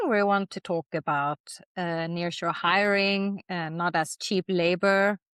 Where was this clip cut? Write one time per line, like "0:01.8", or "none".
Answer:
none